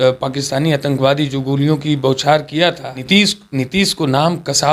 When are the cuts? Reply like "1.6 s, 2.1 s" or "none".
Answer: 2.9 s